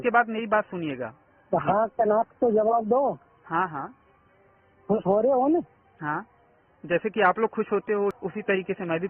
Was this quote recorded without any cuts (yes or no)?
no